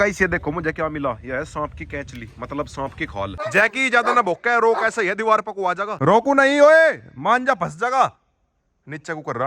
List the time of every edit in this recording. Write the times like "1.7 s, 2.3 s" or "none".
3.4 s, 5.9 s